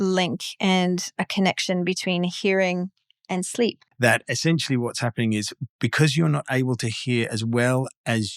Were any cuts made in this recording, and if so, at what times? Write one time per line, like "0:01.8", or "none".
0:03.9